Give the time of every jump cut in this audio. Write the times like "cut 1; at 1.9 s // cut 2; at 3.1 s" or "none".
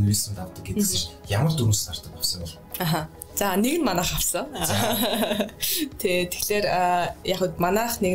none